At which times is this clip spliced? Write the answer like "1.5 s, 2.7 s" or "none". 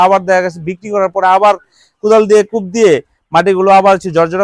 none